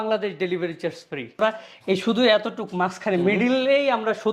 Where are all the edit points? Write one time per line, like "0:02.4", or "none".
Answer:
0:01.4